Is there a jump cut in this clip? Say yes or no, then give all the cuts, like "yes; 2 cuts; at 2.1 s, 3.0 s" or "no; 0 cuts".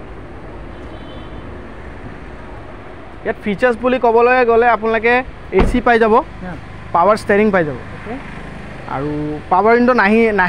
no; 0 cuts